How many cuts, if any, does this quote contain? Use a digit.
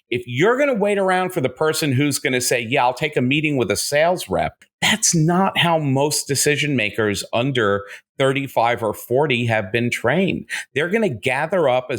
1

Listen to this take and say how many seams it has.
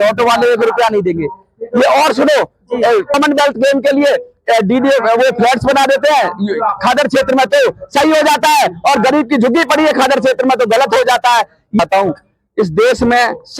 2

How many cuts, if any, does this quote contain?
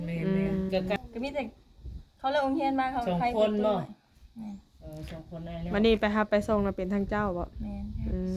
1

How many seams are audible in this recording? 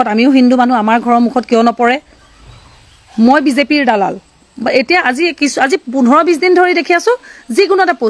0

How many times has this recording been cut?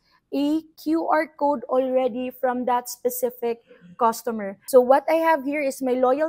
1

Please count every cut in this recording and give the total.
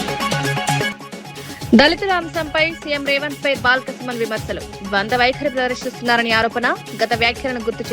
1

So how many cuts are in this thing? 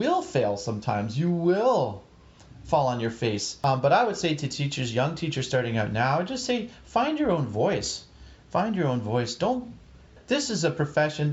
2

